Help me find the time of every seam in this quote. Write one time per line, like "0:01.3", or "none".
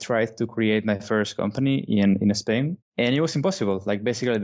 0:02.8